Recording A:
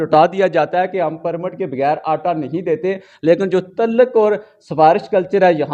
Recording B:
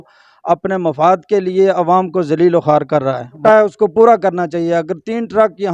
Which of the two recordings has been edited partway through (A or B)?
B